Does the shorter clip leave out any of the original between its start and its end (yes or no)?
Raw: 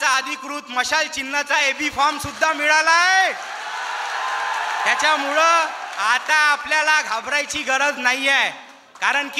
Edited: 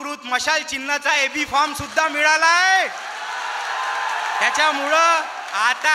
no